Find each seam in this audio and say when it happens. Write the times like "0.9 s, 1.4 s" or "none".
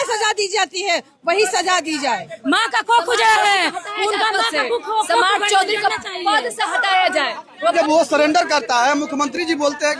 2.3 s, 7.7 s